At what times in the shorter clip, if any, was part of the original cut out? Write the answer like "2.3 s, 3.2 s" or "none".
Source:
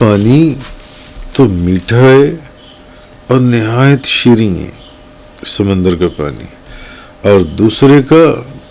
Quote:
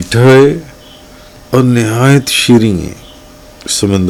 none

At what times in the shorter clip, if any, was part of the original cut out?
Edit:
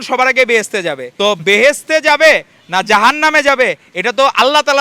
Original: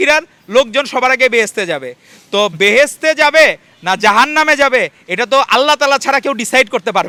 1.0 s

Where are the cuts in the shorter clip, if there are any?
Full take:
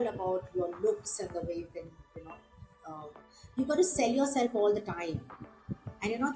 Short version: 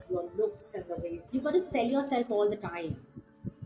1.2 s

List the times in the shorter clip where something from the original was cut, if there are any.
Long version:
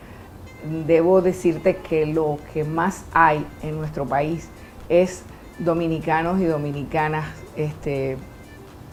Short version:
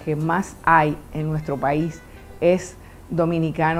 none

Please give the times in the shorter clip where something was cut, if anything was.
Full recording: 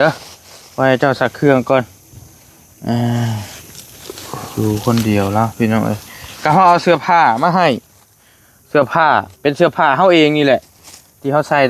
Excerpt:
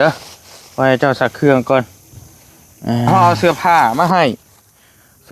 3.1 s

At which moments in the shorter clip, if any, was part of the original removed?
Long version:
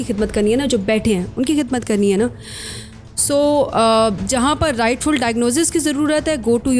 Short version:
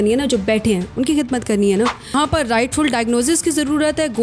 2.1 s

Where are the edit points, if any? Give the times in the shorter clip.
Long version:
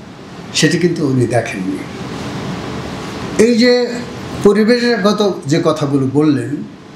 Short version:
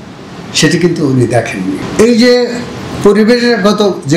1.8 s

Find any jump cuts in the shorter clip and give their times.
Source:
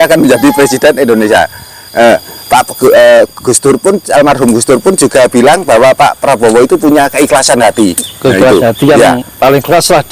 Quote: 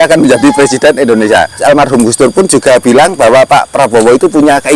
1.6 s

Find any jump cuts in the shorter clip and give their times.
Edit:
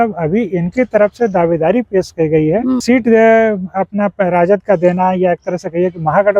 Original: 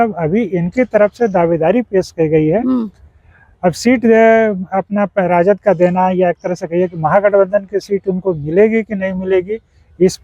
2.8 s

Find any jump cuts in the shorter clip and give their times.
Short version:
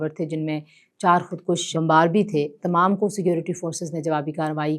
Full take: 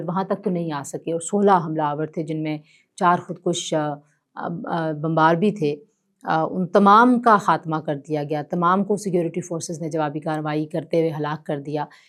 1.7 s, 2.6 s

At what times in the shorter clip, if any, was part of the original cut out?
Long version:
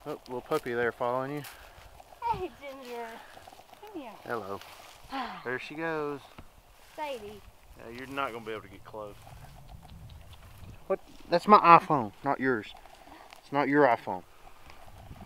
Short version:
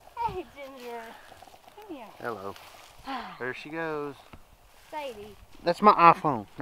5.5 s

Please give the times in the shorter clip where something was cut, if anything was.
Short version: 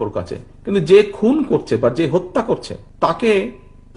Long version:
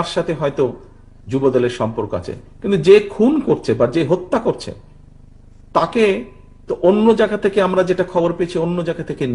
2.8 s

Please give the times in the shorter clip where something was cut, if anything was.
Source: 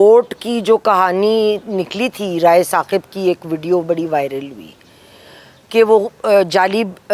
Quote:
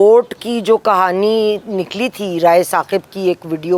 none

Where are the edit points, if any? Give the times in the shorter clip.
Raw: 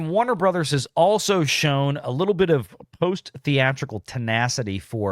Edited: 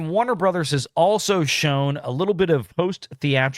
2.7 s

